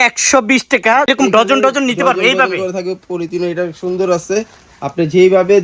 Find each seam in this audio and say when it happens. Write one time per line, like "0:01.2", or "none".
0:01.1